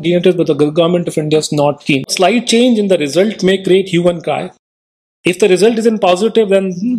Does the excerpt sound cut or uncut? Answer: cut